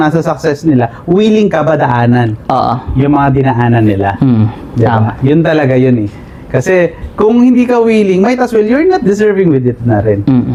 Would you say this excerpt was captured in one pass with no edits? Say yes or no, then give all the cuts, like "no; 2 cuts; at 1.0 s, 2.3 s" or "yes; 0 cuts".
yes; 0 cuts